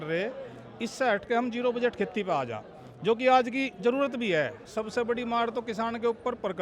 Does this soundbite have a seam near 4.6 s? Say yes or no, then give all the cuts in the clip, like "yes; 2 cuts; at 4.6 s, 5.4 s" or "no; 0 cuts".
yes; 1 cut; at 4.6 s